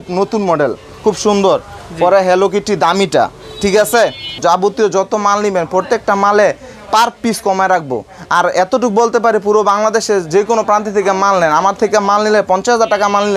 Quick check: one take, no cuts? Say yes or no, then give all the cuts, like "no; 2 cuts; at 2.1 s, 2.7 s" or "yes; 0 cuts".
yes; 0 cuts